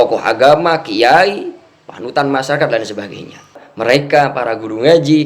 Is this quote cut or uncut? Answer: cut